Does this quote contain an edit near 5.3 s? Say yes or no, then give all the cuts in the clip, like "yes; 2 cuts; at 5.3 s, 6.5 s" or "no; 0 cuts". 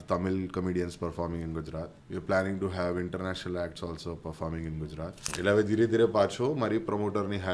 yes; 2 cuts; at 2.0 s, 5.3 s